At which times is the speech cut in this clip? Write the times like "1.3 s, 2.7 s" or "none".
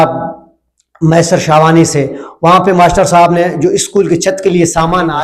none